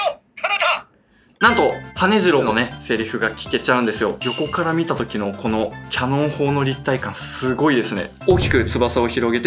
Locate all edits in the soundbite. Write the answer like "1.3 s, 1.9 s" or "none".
4.2 s, 8.1 s